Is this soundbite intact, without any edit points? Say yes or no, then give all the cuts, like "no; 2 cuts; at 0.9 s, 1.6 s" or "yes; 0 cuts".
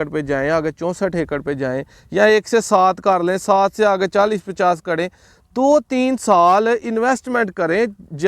yes; 0 cuts